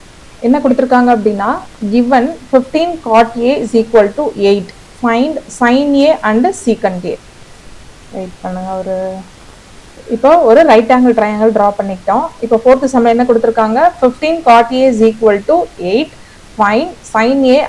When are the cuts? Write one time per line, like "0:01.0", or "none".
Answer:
0:10.0